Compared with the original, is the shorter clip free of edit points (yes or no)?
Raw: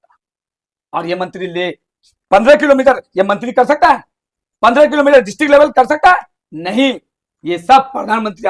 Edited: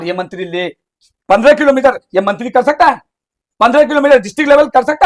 yes